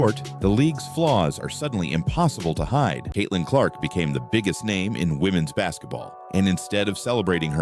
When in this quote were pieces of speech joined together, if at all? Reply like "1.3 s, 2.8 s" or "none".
3.0 s